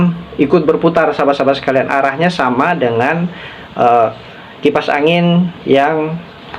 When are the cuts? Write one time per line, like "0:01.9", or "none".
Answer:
none